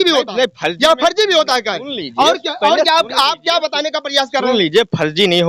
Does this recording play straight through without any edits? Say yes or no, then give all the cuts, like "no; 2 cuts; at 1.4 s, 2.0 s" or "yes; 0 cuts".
yes; 0 cuts